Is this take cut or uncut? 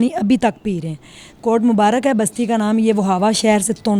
uncut